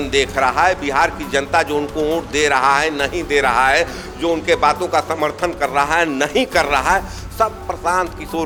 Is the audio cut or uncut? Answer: uncut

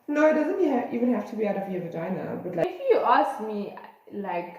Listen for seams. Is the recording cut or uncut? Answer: cut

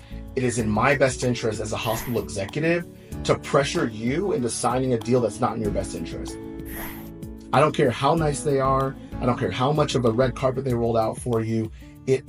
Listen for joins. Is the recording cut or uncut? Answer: uncut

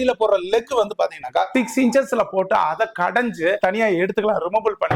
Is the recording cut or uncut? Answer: cut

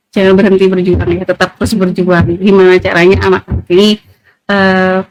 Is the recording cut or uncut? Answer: uncut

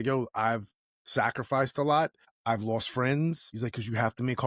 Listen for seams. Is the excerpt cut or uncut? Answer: cut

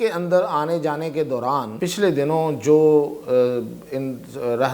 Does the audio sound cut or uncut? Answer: cut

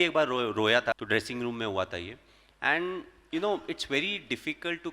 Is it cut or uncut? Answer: cut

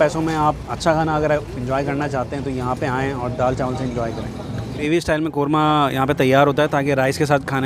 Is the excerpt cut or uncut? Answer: cut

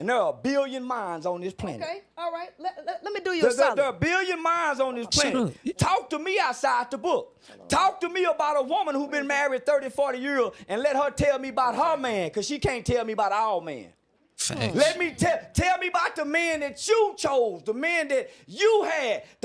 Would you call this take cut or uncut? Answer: uncut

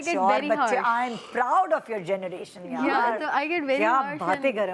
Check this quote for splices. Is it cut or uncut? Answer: uncut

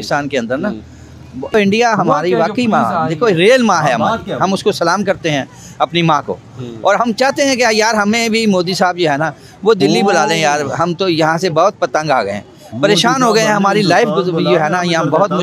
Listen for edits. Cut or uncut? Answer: cut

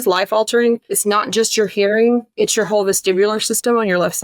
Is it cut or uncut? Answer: cut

